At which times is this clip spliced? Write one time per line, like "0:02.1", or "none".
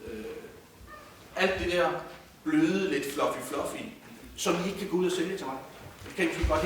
0:04.2